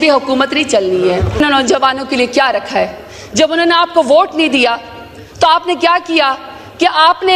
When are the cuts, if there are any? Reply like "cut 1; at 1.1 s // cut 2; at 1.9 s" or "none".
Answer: cut 1; at 1.4 s